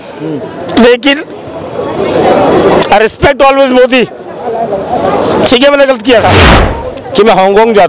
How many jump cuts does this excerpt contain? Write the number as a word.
one